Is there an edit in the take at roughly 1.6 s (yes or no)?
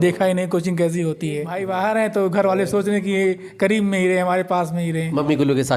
yes